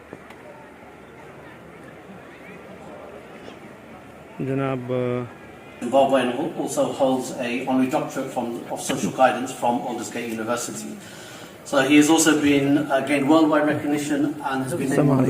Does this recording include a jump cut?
yes; 1 cut; at 5.8 s

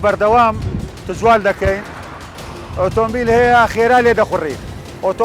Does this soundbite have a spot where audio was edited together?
yes; 1 cut; at 2.3 s

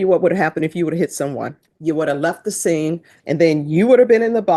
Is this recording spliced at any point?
yes; 2 cuts; at 1.7 s, 3.1 s

